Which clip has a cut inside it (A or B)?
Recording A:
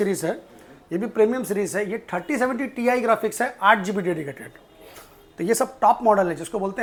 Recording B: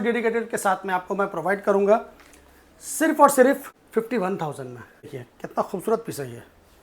B